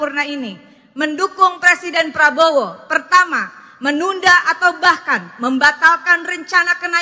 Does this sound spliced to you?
no; 0 cuts

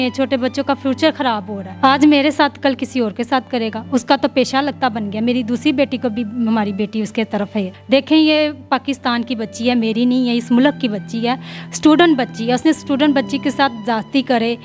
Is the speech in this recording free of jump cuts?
no; 2 cuts; at 1.6 s, 7.8 s

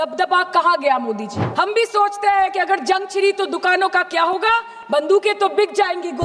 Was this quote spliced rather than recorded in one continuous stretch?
yes; 1 cut; at 1.4 s

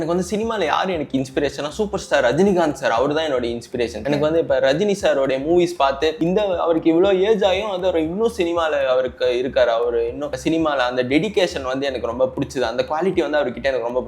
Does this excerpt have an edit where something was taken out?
yes; 3 cuts; at 4.0 s, 6.2 s, 10.3 s

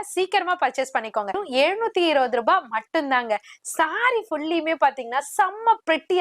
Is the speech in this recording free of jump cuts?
no; 1 cut; at 1.4 s

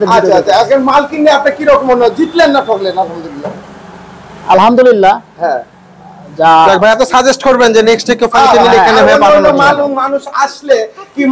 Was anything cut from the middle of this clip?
no; 0 cuts

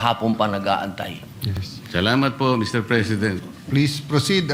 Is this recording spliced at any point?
no; 0 cuts

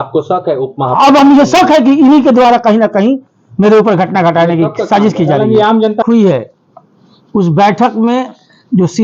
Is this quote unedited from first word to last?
no; 1 cut; at 6.0 s

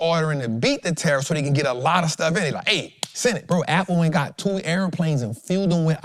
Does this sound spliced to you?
no; 0 cuts

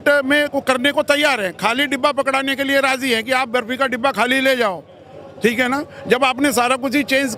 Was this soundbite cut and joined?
no; 0 cuts

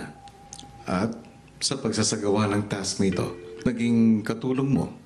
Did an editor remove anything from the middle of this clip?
yes; 1 cut; at 3.8 s

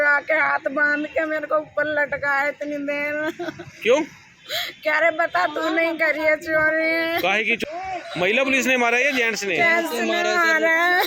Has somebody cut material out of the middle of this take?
yes; 1 cut; at 7.6 s

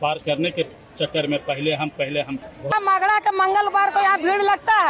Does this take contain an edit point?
yes; 1 cut; at 2.7 s

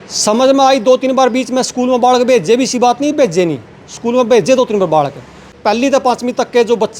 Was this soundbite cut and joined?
yes; 1 cut; at 5.5 s

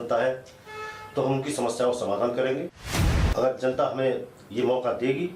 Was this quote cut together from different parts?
yes; 1 cut; at 3.2 s

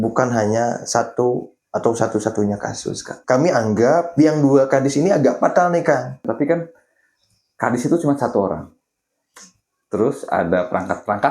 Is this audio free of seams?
no; 2 cuts; at 3.2 s, 6.2 s

